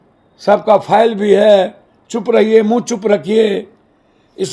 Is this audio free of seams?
yes; 0 cuts

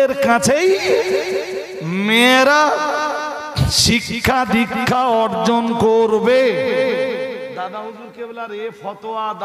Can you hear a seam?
no; 0 cuts

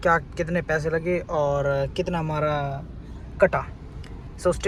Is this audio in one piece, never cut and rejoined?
yes; 0 cuts

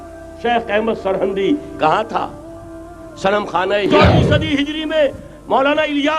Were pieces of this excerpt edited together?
yes; 1 cut; at 3.9 s

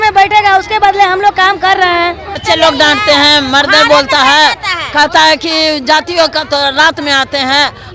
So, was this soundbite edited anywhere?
yes; 1 cut; at 2.4 s

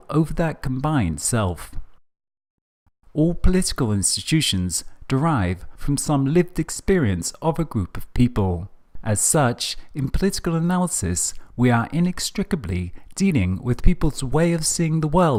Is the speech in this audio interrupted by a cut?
no; 0 cuts

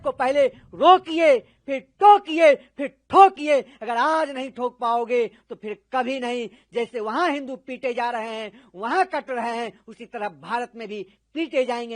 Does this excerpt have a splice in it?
no; 0 cuts

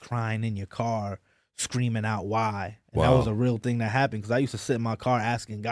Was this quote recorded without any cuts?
yes; 0 cuts

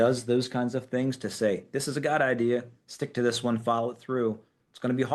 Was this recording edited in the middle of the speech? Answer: no; 0 cuts

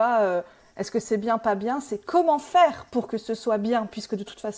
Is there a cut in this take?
no; 0 cuts

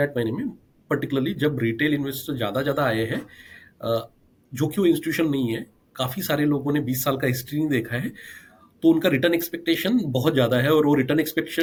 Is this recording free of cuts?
yes; 0 cuts

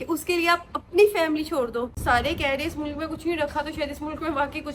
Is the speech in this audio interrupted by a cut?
yes; 1 cut; at 1.9 s

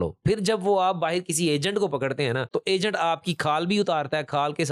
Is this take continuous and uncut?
yes; 0 cuts

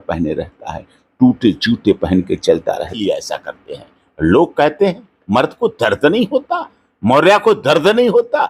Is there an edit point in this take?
yes; 1 cut; at 2.9 s

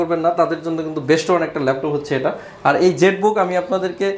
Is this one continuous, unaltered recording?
yes; 0 cuts

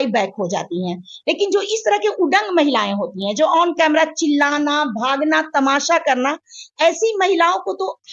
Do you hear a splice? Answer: no; 0 cuts

